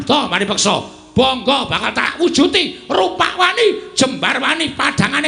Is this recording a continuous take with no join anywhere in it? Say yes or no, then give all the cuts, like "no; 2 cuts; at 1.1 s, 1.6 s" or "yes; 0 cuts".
no; 1 cut; at 2.0 s